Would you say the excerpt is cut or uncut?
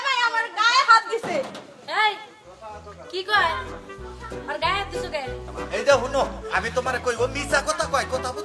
uncut